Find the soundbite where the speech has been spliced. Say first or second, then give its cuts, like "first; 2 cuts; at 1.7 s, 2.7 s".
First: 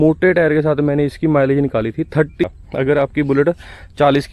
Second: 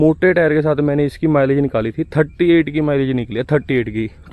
first; 1 cut; at 2.4 s